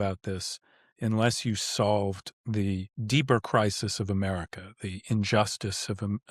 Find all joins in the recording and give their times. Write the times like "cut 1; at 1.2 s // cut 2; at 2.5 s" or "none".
cut 1; at 2.9 s